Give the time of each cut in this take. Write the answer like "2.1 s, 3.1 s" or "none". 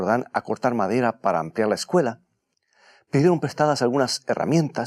none